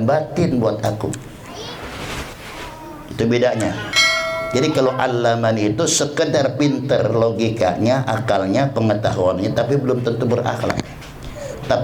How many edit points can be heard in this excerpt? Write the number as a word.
zero